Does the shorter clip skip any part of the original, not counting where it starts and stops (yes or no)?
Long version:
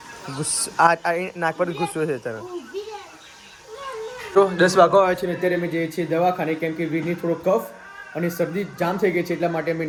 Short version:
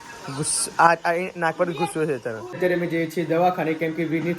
yes